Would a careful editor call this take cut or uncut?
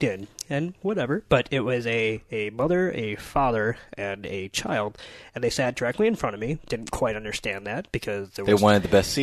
uncut